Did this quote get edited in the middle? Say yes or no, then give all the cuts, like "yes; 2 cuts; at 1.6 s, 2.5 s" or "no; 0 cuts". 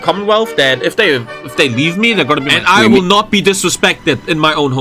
yes; 1 cut; at 2.5 s